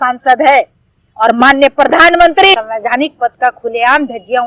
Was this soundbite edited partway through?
yes; 1 cut; at 2.5 s

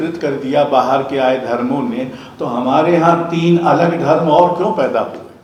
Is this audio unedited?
yes; 0 cuts

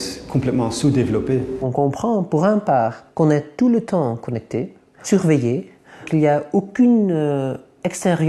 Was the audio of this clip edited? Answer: yes; 4 cuts; at 1.6 s, 3.0 s, 5.0 s, 6.1 s

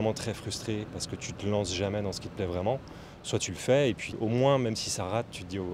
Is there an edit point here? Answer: yes; 2 cuts; at 1.0 s, 4.1 s

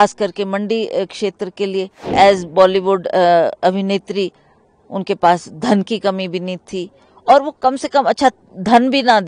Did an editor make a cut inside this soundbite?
yes; 1 cut; at 2.1 s

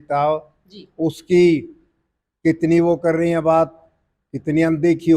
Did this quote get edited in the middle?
no; 0 cuts

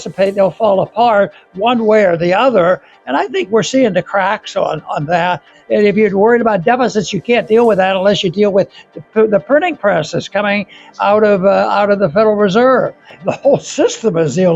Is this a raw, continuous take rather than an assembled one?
no; 2 cuts; at 5.5 s, 13.2 s

